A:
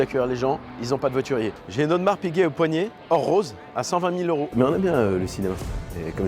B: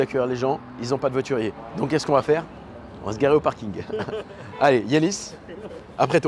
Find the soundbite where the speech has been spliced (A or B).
A